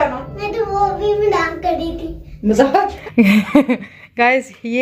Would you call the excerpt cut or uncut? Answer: cut